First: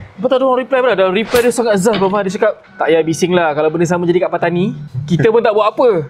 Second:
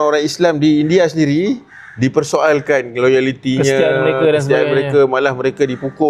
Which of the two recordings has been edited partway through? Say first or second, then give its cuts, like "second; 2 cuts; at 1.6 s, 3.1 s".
first; 2 cuts; at 2.7 s, 4.9 s